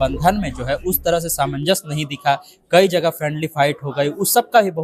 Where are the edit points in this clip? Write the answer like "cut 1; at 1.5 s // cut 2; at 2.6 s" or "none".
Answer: none